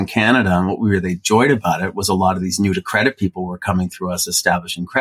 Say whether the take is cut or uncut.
uncut